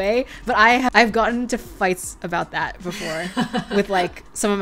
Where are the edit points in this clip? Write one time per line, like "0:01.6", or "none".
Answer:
0:00.9